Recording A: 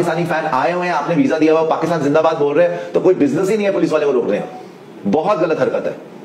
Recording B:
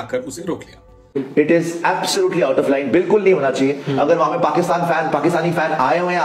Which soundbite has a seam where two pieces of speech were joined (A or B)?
B